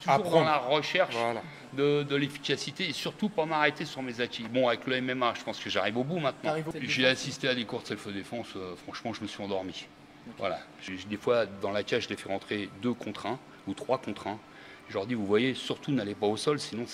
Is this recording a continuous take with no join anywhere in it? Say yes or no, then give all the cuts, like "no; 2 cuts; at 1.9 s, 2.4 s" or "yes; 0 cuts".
no; 2 cuts; at 6.7 s, 10.9 s